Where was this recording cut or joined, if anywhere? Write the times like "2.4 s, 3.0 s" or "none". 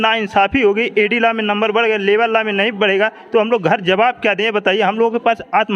none